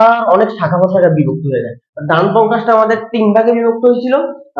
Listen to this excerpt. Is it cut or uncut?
uncut